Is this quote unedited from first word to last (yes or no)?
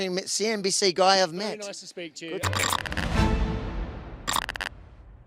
no